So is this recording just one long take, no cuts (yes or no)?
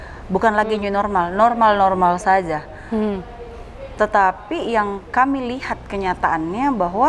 yes